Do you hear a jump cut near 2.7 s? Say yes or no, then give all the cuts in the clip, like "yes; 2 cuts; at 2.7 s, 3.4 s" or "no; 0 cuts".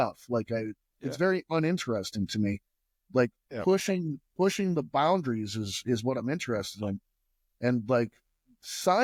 no; 0 cuts